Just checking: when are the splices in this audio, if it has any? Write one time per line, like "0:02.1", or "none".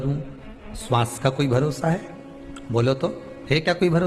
none